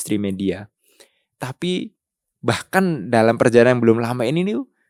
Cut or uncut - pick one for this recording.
uncut